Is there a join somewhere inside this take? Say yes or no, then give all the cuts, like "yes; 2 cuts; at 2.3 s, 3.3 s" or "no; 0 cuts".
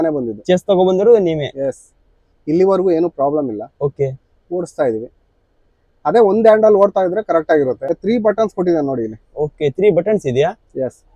yes; 1 cut; at 7.9 s